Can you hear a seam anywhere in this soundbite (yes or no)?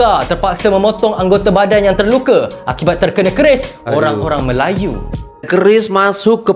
yes